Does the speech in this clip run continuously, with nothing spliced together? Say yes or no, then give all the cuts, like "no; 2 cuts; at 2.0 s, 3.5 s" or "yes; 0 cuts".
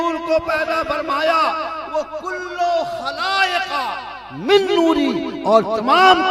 yes; 0 cuts